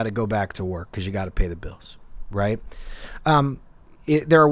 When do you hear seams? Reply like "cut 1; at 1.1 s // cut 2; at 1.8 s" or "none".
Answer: none